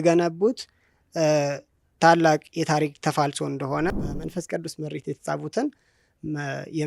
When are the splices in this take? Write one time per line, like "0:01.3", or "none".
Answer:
0:04.0